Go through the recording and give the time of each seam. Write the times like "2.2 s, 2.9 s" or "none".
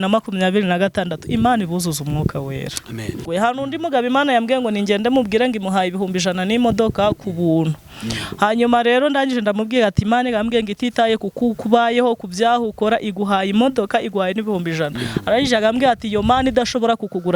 3.2 s